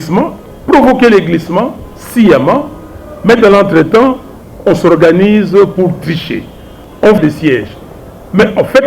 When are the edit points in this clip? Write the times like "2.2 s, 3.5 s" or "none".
7.2 s

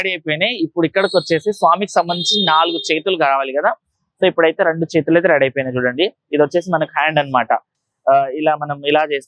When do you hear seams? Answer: none

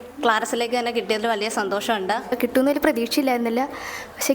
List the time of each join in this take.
2.3 s

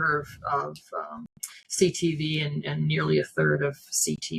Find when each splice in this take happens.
none

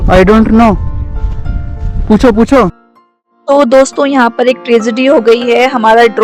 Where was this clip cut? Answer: none

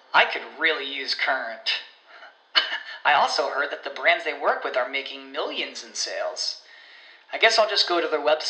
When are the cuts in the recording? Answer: none

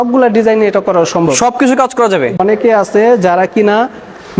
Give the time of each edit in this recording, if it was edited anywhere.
2.4 s

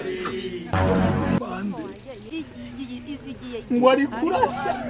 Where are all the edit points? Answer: 2.2 s

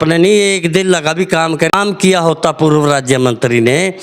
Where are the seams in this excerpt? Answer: 1.7 s

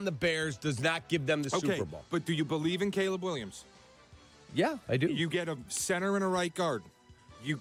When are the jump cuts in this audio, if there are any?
none

